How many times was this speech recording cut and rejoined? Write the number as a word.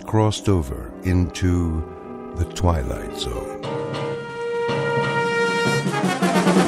one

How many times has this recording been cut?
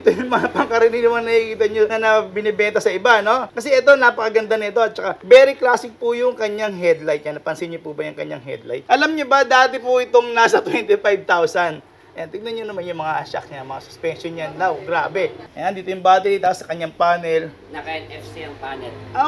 five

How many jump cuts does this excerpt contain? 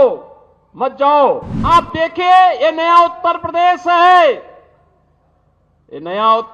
one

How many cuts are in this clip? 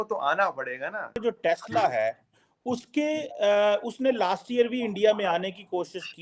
one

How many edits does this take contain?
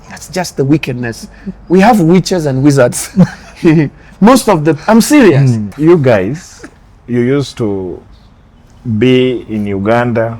one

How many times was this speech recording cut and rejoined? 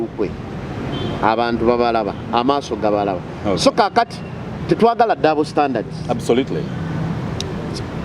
zero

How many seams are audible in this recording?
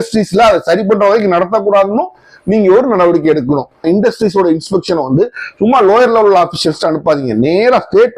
one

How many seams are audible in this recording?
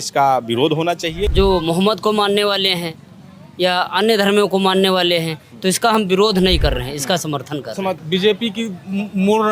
two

